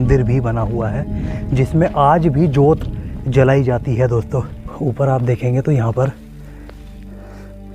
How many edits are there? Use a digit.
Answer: 1